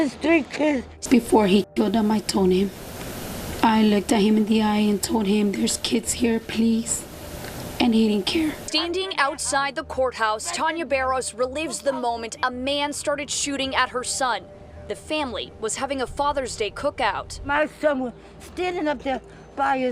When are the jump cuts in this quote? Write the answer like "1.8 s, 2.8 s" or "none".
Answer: 0.9 s, 8.6 s